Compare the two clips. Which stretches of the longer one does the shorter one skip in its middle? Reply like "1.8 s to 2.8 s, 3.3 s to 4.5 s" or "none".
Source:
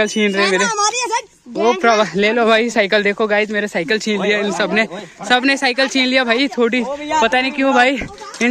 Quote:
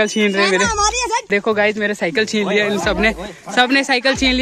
1.3 s to 3.0 s